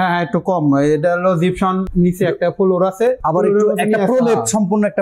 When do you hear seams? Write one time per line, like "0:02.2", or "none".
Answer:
0:01.9
0:03.2